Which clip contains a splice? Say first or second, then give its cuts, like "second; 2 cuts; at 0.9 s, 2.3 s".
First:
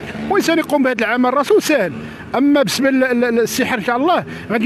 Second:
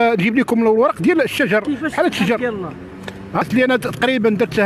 second; 1 cut; at 3.4 s